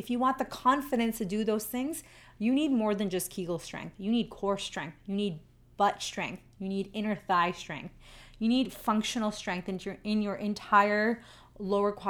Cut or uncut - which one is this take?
uncut